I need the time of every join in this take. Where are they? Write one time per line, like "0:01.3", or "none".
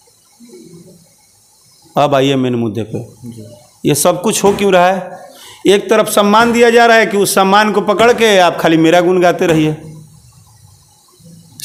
none